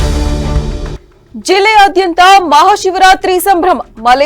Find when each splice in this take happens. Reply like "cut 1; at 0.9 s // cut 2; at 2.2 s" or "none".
cut 1; at 0.9 s